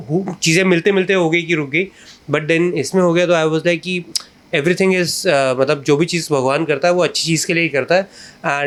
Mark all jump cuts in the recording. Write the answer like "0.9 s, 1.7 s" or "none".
none